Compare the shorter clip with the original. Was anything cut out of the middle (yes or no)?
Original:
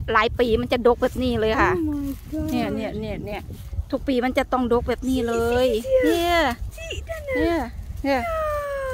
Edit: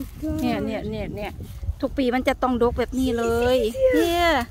no